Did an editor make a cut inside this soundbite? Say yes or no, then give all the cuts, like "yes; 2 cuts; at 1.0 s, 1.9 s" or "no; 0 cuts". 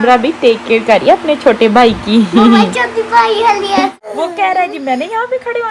yes; 1 cut; at 4.1 s